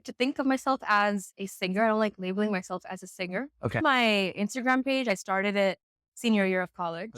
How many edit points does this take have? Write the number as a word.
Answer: two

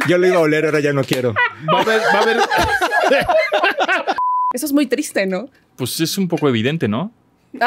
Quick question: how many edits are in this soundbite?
one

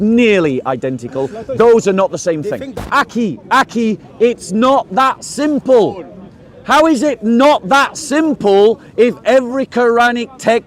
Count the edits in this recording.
one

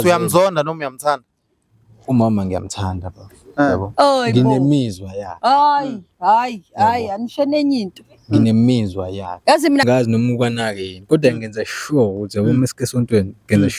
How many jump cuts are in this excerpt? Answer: one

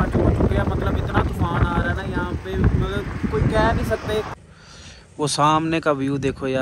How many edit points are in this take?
one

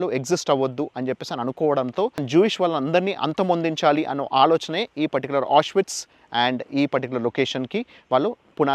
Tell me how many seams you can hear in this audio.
one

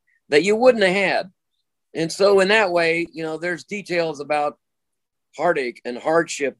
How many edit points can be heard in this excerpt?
zero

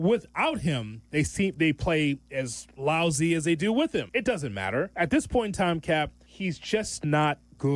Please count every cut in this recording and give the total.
two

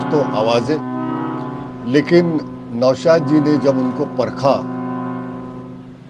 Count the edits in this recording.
zero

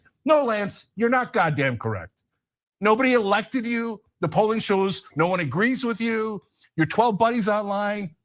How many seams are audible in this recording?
zero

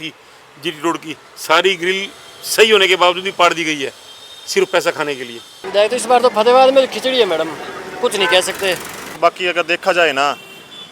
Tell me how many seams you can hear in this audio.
two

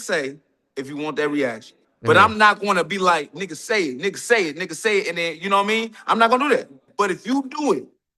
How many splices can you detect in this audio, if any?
two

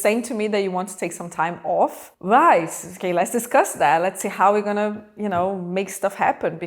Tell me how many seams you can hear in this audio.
zero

